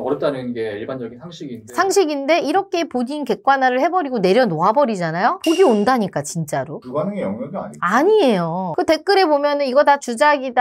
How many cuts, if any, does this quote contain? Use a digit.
0